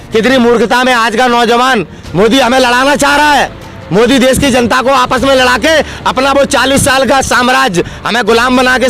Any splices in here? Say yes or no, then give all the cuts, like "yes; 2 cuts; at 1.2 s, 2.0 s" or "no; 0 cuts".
yes; 1 cut; at 2.0 s